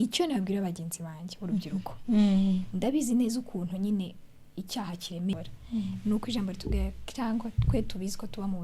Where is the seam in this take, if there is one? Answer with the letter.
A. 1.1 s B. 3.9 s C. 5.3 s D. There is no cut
C